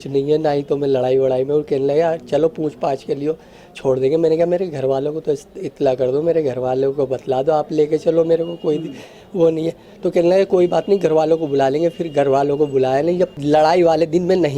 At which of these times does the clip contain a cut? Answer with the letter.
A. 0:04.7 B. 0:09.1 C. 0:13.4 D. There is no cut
C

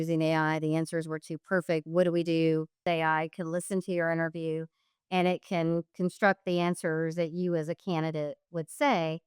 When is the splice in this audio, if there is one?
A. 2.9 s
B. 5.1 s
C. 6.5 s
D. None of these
A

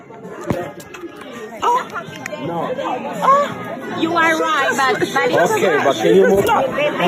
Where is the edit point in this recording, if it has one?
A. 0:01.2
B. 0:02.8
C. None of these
C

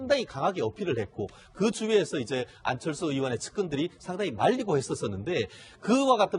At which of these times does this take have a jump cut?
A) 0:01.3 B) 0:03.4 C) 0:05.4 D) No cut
B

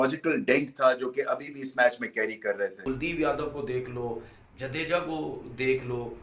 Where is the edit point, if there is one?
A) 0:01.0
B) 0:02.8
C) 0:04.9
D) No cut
B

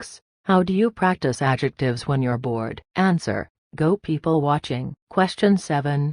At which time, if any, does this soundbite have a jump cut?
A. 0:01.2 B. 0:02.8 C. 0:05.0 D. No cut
C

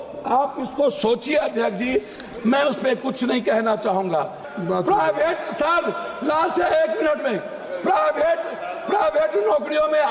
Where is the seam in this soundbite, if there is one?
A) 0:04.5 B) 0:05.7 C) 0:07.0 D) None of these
A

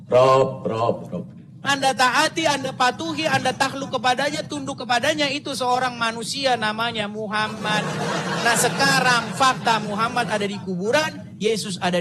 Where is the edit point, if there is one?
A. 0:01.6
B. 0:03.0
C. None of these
A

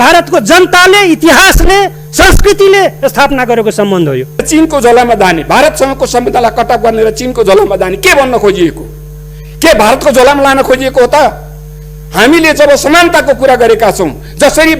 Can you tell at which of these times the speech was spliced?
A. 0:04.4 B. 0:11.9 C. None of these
A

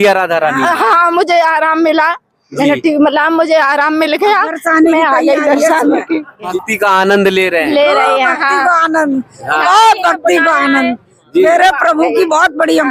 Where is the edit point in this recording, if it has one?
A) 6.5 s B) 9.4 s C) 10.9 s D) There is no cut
A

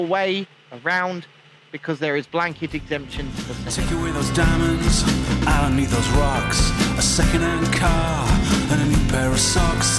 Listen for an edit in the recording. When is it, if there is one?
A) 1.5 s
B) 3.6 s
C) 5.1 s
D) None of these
B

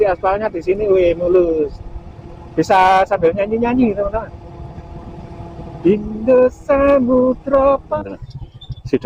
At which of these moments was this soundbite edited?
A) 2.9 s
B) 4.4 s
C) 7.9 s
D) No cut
C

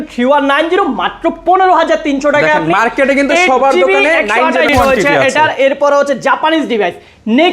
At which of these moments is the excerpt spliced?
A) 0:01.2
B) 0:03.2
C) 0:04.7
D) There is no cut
C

